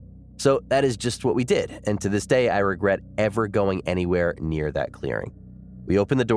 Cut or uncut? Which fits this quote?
uncut